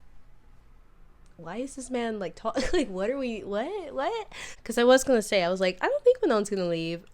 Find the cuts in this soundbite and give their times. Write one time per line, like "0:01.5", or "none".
0:04.5